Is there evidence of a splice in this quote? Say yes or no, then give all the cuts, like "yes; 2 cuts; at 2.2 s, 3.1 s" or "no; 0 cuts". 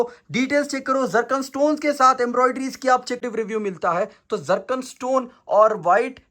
yes; 1 cut; at 3.2 s